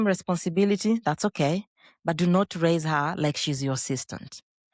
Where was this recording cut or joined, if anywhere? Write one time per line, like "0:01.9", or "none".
none